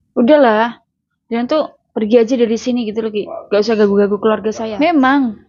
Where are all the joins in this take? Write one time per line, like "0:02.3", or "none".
0:04.5